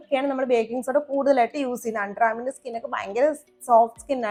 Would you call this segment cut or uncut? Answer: uncut